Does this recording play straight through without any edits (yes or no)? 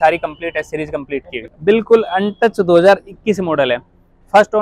no